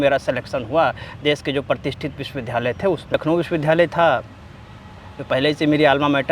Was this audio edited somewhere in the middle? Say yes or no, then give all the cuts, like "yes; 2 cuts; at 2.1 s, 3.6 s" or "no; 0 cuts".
yes; 1 cut; at 3.1 s